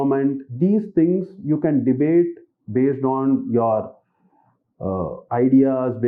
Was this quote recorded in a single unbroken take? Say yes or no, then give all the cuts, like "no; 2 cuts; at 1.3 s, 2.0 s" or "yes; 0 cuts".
yes; 0 cuts